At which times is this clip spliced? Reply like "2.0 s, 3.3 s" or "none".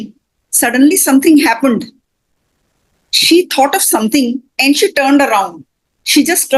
none